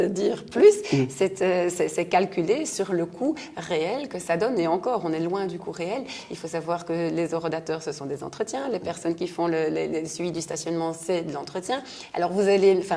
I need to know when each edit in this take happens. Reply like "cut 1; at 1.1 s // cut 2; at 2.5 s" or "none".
none